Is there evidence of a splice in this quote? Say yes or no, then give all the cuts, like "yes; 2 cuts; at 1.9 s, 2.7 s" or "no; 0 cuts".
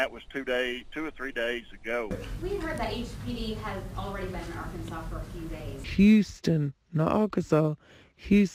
no; 0 cuts